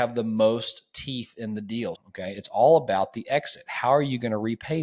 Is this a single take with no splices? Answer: no; 1 cut; at 2.0 s

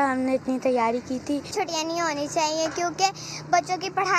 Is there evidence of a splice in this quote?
yes; 1 cut; at 1.5 s

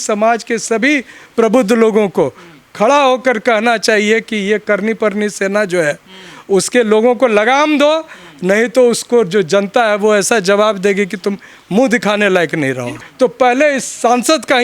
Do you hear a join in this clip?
yes; 1 cut; at 13.0 s

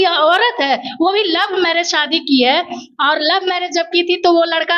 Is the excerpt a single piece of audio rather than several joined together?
yes; 0 cuts

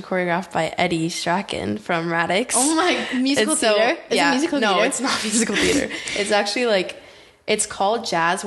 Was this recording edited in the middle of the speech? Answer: no; 0 cuts

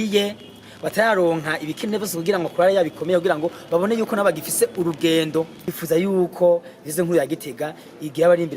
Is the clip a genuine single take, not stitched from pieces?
no; 1 cut; at 5.6 s

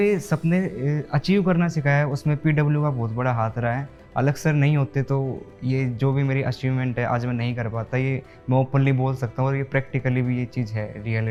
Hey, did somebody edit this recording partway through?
no; 0 cuts

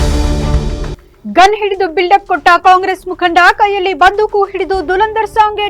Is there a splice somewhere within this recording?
yes; 1 cut; at 0.9 s

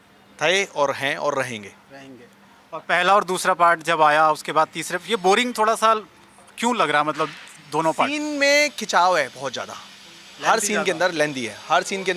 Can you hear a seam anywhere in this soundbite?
no; 0 cuts

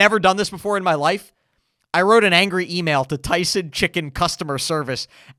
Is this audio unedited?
yes; 0 cuts

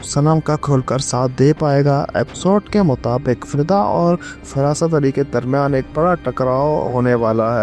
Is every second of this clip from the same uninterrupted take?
yes; 0 cuts

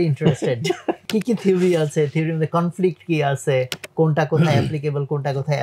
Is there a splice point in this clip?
yes; 1 cut; at 1.0 s

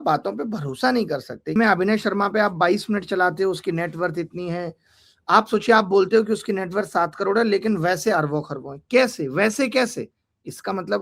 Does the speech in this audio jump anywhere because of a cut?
yes; 1 cut; at 1.6 s

